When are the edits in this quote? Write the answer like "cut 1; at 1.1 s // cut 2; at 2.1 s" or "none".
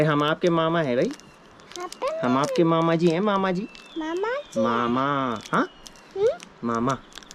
none